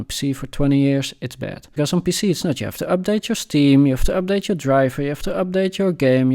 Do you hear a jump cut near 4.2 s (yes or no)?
no